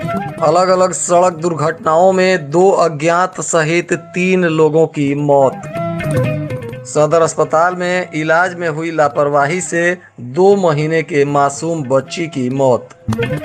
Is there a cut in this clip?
no; 0 cuts

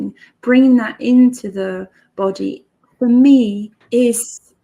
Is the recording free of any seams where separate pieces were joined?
no; 1 cut; at 3.7 s

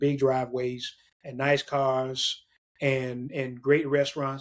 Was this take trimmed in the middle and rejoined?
no; 0 cuts

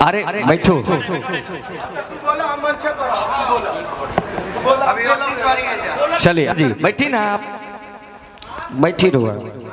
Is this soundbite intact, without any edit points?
no; 1 cut; at 6.5 s

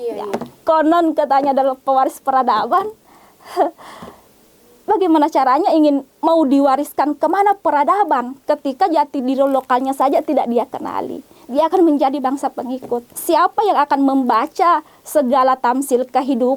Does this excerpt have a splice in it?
yes; 1 cut; at 13.1 s

